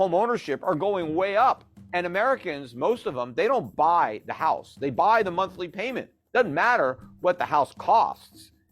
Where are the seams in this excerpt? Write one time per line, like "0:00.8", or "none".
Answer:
0:01.7